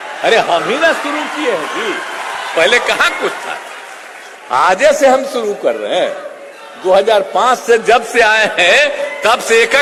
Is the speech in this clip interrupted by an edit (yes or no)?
no